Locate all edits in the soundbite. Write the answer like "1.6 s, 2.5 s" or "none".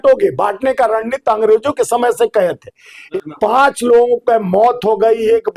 3.0 s